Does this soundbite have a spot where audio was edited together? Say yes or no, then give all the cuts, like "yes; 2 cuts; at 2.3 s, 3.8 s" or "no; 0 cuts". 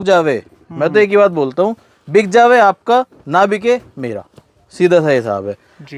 no; 0 cuts